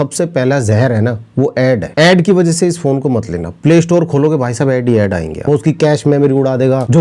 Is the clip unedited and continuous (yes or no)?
no